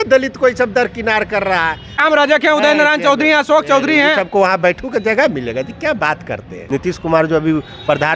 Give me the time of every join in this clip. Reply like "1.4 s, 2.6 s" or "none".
2.0 s, 6.5 s